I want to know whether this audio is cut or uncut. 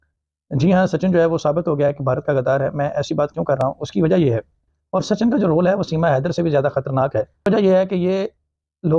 cut